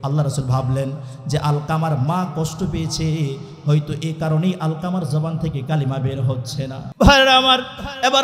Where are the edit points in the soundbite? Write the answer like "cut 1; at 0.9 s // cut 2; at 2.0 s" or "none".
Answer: cut 1; at 6.8 s